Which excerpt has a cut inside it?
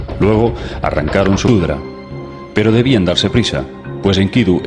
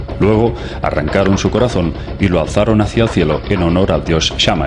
second; 1 cut; at 1.5 s

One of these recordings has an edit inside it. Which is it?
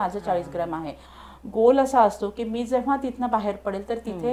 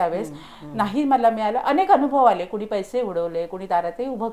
first; 1 cut; at 1.1 s

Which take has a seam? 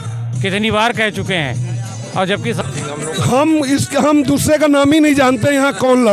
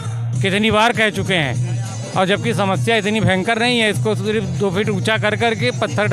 first; 1 cut; at 2.6 s

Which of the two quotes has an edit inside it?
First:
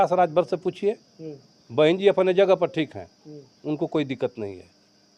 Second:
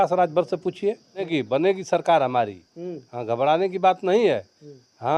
second; 1 cut; at 1.3 s

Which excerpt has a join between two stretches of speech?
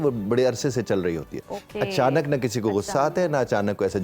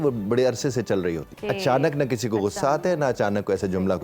second; 1 cut; at 1.3 s

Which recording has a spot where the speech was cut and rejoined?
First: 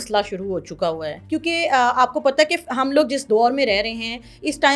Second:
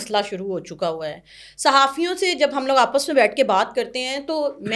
first; 2 cuts; at 1.1 s, 3.2 s

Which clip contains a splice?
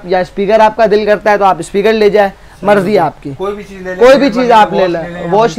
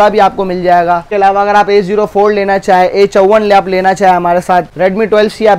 second; 2 cuts; at 1.1 s, 4.7 s

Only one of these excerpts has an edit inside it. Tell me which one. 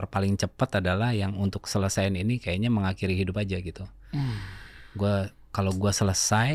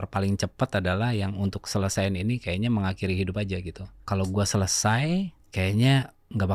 second; 2 cuts; at 3.9 s, 5.4 s

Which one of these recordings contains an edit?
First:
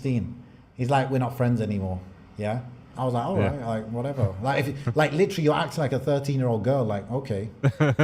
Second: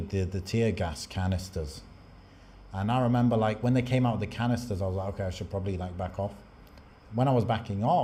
first; 1 cut; at 2.9 s

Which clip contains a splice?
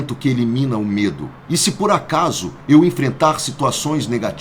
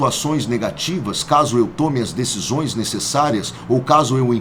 first; 1 cut; at 1.3 s

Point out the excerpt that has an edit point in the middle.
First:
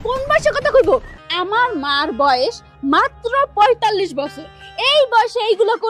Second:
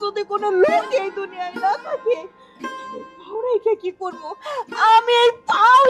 first; 1 cut; at 1.1 s

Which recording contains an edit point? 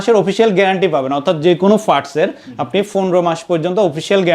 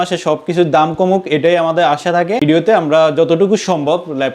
second; 1 cut; at 2.4 s

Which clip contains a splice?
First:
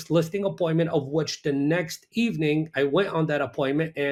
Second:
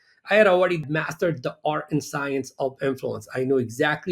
second; 1 cut; at 0.9 s

